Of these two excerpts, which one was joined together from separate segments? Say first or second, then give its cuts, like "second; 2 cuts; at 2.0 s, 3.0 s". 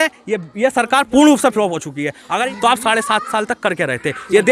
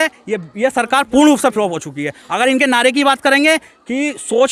first; 1 cut; at 2.4 s